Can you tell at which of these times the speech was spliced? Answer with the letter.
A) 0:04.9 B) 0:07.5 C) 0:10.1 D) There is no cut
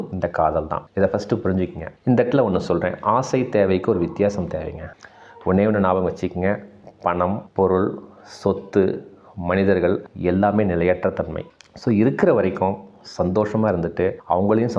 A